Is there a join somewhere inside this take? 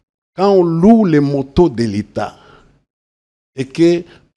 no; 0 cuts

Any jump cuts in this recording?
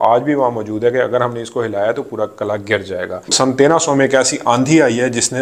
yes; 1 cut; at 3.3 s

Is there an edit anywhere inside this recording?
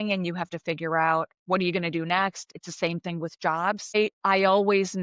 yes; 3 cuts; at 1.4 s, 2.5 s, 3.9 s

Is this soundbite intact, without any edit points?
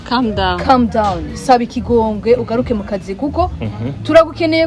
yes; 0 cuts

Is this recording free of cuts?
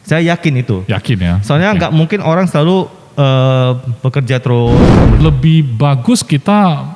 no; 1 cut; at 5.2 s

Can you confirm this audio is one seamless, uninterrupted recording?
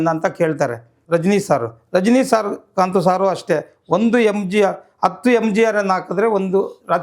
no; 1 cut; at 0.9 s

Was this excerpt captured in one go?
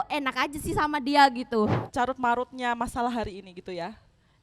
no; 1 cut; at 1.8 s

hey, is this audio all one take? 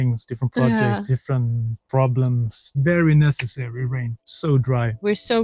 no; 1 cut; at 2.7 s

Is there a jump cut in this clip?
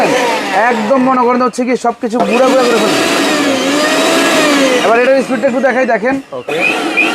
no; 0 cuts

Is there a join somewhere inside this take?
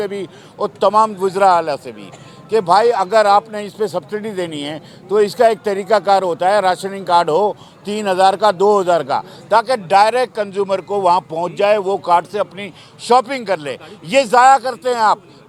no; 0 cuts

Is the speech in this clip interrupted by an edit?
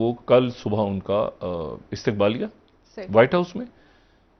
no; 0 cuts

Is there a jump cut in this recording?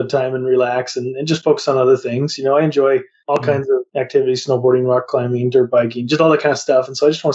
yes; 1 cut; at 3.5 s

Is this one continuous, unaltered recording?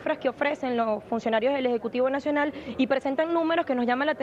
no; 1 cut; at 3.0 s

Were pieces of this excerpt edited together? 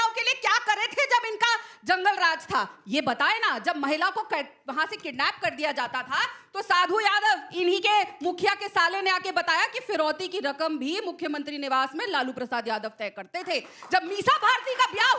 no; 0 cuts

